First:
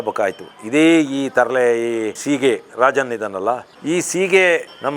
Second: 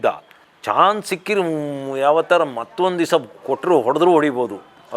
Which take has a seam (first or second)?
first